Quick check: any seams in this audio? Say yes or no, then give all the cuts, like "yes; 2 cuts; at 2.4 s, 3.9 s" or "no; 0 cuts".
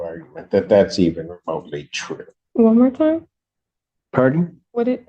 yes; 1 cut; at 2.4 s